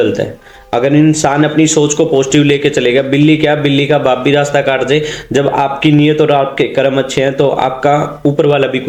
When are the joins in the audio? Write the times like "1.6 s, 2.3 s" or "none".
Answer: none